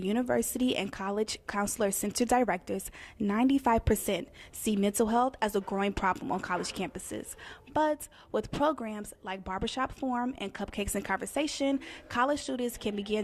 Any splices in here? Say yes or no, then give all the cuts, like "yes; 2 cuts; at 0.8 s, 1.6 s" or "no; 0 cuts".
no; 0 cuts